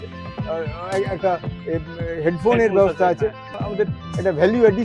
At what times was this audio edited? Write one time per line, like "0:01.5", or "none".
0:03.4